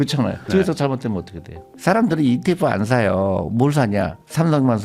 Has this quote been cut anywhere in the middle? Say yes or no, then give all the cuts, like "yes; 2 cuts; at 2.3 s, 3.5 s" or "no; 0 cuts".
yes; 1 cut; at 1.7 s